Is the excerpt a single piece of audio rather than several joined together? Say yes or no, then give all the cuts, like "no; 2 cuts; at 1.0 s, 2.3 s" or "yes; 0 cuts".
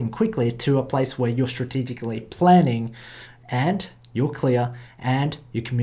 yes; 0 cuts